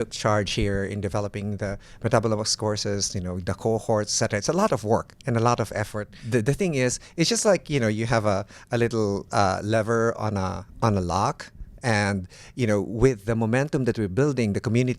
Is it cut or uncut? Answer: cut